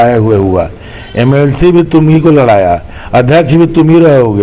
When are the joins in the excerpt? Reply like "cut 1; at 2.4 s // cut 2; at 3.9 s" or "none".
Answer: none